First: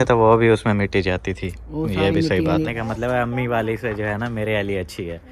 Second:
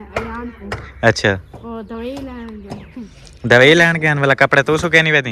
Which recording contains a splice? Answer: first; 1 cut; at 2.7 s

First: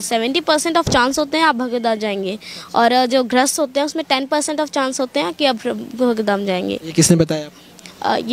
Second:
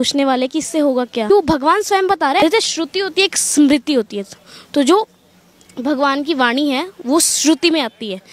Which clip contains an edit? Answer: second; 2 cuts; at 1.3 s, 2.4 s

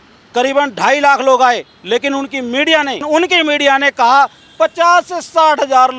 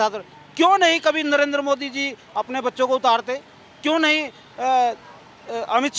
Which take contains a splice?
first; 1 cut; at 3.0 s

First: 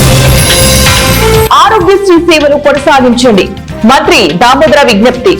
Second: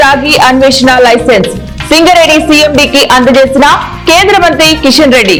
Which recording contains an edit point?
first; 1 cut; at 1.3 s

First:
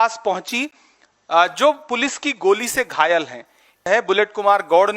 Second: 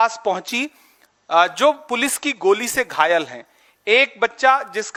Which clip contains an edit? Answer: first; 1 cut; at 3.9 s

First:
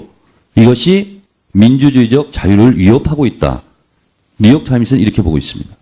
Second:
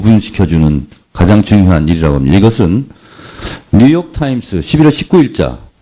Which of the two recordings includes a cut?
first; 1 cut; at 3.9 s

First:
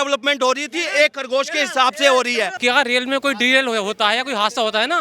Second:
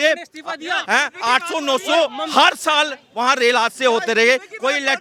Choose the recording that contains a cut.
first; 1 cut; at 2.5 s

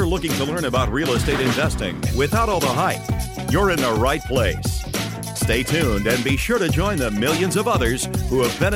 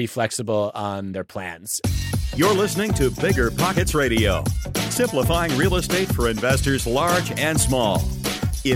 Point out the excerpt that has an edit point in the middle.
second; 1 cut; at 1.6 s

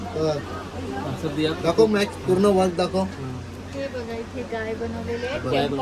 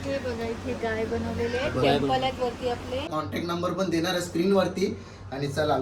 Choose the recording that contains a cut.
second; 1 cut; at 3.1 s

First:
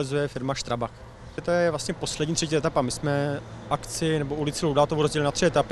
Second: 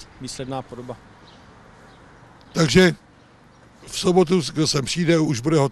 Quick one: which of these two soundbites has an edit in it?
first; 1 cut; at 1.4 s

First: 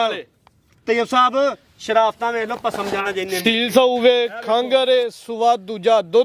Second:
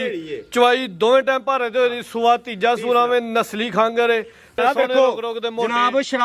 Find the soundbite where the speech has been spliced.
second; 1 cut; at 4.5 s

